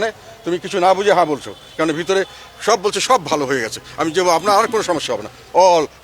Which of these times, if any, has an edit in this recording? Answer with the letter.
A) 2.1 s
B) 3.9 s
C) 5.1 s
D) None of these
D